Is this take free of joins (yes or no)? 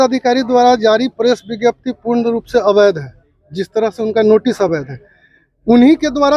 yes